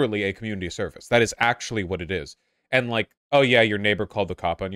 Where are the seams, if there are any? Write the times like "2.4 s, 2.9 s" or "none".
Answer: 3.2 s